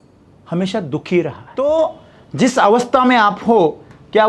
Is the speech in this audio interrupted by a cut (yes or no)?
yes